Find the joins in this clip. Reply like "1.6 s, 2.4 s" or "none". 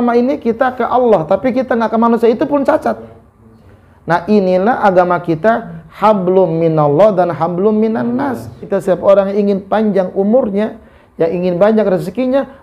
8.7 s